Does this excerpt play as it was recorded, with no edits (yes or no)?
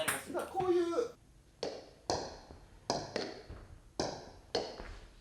yes